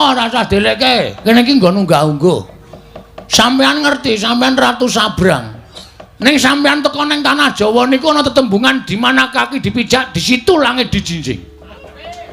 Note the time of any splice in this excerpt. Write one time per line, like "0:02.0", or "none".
0:01.1